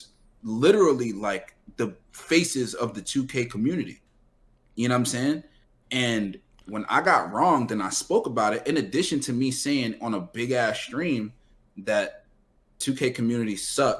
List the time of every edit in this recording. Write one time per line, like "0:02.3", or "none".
0:12.8